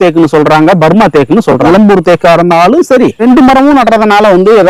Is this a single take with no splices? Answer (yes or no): no